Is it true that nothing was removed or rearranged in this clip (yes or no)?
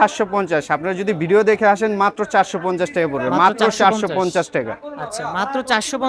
yes